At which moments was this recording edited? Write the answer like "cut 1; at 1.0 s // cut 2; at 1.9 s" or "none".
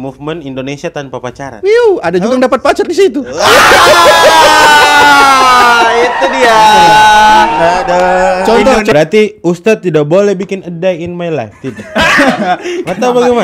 cut 1; at 8.9 s